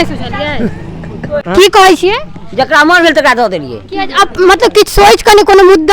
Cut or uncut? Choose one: cut